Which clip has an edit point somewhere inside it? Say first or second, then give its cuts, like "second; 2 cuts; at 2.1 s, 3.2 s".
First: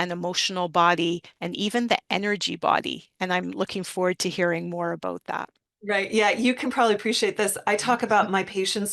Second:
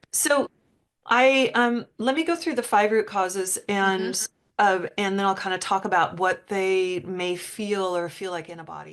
first; 1 cut; at 5.7 s